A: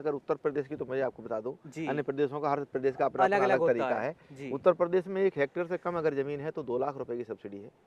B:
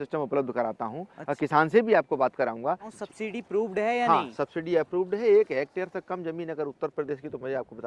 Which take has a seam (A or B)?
B